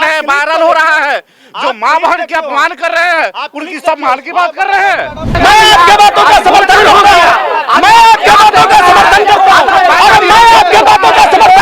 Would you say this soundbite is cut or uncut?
cut